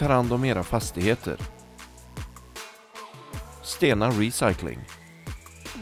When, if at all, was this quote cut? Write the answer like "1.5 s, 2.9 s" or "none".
4.9 s

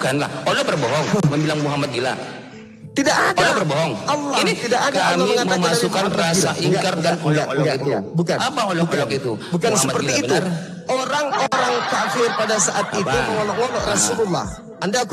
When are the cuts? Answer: none

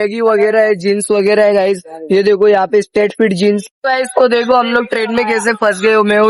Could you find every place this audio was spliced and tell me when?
3.7 s

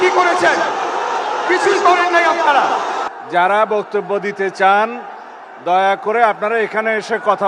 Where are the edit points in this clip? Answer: 3.1 s

